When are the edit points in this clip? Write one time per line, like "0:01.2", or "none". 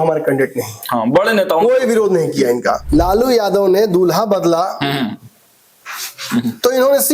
0:02.8